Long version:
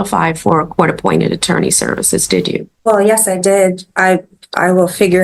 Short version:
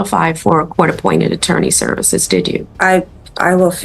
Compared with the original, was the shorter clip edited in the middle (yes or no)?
yes